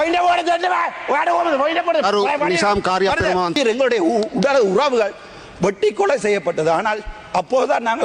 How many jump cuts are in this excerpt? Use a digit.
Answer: 1